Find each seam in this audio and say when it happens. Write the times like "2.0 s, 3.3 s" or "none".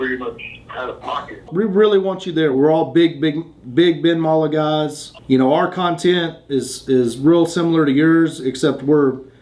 1.5 s